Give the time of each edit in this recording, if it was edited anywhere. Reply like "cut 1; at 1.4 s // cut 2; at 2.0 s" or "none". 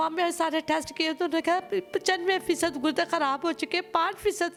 none

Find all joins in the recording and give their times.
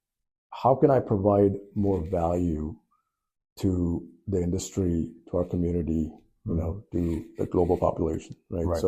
none

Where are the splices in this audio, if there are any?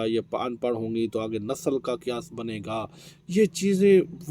none

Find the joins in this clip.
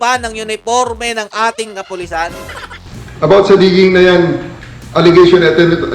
cut 1; at 2.7 s

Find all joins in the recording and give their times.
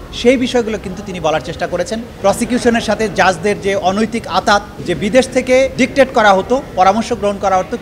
cut 1; at 2.1 s // cut 2; at 4.8 s

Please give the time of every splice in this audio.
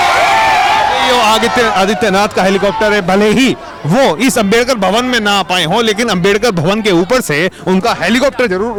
none

